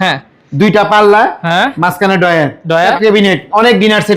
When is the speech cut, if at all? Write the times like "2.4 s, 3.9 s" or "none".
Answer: 2.9 s